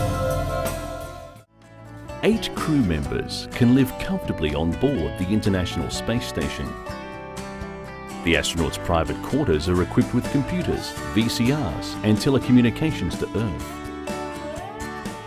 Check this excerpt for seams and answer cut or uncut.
cut